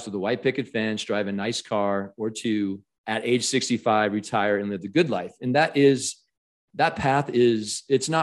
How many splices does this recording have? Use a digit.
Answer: 1